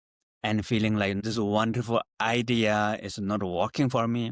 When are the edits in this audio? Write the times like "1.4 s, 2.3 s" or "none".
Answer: 1.2 s